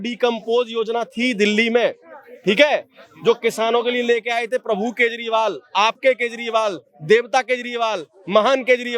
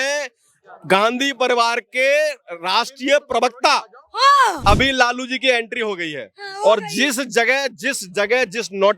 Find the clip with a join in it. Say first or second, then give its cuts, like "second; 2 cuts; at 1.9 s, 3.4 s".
second; 1 cut; at 4.6 s